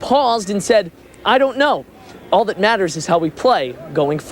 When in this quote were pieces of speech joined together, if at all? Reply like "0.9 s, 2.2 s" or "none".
none